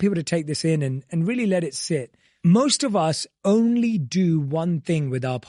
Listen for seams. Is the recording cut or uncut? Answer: cut